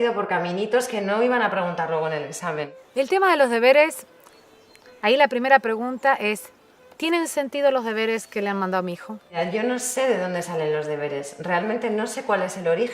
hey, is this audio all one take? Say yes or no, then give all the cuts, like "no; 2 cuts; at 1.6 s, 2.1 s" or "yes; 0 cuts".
no; 1 cut; at 2.9 s